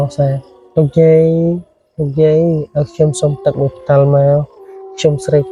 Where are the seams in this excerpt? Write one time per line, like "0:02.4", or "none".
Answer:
none